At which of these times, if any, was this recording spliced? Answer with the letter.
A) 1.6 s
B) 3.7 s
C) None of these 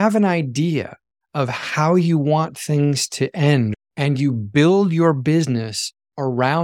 B